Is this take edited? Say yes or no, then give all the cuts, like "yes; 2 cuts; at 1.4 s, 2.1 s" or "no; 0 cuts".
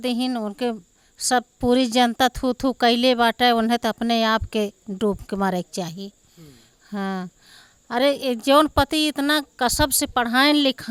no; 0 cuts